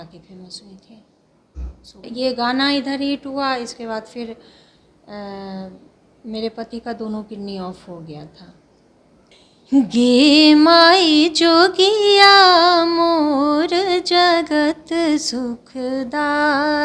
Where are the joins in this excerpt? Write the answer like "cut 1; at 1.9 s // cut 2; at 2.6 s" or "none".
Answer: cut 1; at 2.1 s // cut 2; at 9.2 s